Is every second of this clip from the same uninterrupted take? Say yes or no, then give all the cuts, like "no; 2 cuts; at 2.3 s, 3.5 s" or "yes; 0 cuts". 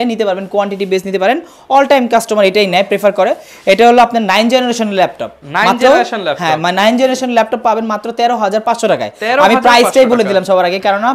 yes; 0 cuts